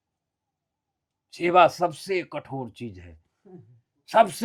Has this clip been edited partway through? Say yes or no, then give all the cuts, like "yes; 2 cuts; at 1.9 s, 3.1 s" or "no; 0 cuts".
no; 0 cuts